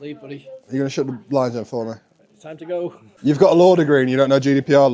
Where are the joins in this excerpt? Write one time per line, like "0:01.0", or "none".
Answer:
0:03.1